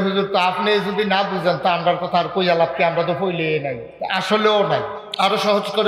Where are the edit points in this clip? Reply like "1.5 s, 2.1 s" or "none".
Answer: 5.0 s